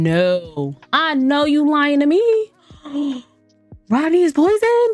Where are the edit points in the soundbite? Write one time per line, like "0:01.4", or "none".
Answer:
0:02.7